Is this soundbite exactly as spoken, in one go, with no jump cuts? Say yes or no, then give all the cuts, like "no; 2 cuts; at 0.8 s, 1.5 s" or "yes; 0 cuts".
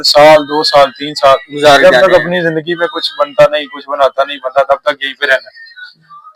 yes; 0 cuts